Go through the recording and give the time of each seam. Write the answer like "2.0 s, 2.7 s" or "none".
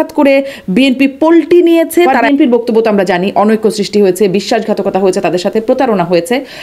2.2 s